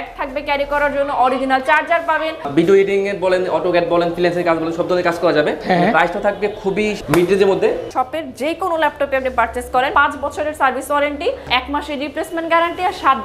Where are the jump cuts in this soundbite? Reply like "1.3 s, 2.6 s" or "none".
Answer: 2.5 s, 5.6 s, 7.9 s, 9.9 s, 11.5 s